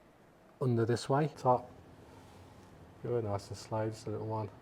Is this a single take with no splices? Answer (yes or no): no